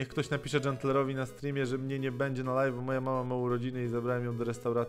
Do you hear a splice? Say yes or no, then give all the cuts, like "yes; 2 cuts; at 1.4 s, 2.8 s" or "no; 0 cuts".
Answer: no; 0 cuts